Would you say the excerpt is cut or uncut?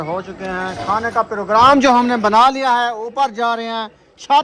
uncut